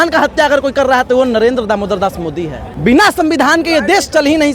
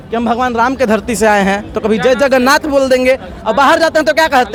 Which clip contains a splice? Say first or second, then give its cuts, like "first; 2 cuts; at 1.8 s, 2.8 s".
first; 1 cut; at 2.6 s